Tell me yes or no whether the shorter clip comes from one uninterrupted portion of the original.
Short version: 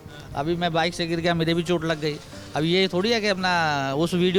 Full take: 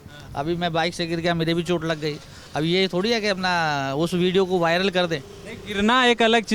yes